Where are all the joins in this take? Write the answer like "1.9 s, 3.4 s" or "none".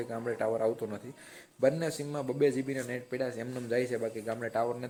none